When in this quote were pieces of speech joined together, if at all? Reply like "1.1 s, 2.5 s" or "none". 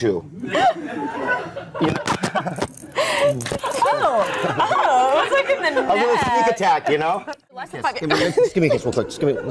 7.7 s